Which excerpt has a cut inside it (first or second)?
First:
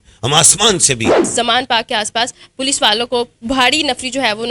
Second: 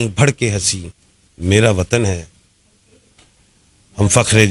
first